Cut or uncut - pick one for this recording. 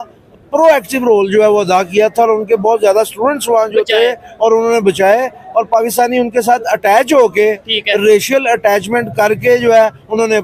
uncut